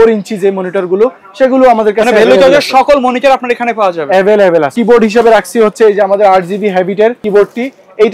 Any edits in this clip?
yes; 2 cuts; at 4.8 s, 7.2 s

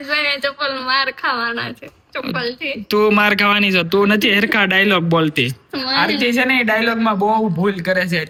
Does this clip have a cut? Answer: no; 0 cuts

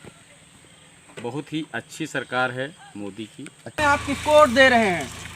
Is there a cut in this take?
yes; 1 cut; at 3.8 s

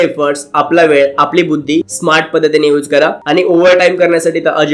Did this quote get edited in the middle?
yes; 2 cuts; at 1.9 s, 3.2 s

